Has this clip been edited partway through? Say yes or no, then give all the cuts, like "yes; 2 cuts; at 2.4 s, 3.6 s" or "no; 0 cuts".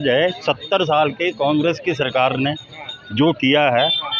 no; 0 cuts